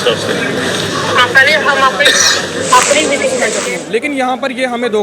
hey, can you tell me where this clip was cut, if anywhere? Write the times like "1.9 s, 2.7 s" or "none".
3.5 s